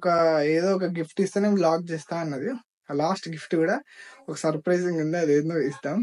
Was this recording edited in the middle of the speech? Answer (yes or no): no